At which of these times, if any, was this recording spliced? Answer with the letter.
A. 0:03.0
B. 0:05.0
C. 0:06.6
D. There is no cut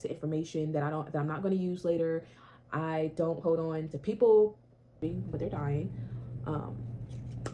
B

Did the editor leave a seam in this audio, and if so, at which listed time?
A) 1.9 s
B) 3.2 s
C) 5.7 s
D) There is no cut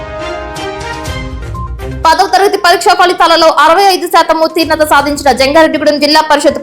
A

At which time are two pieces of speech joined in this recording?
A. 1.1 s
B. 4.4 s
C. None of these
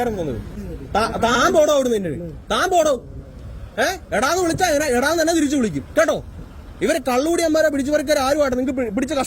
A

